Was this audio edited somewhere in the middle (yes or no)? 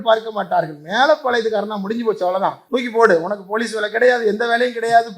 yes